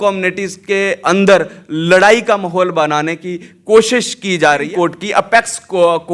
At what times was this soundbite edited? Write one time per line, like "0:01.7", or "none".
0:04.7